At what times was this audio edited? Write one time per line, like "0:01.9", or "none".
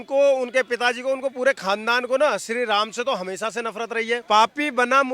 0:04.2